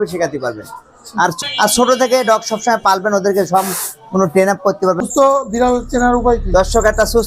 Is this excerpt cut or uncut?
cut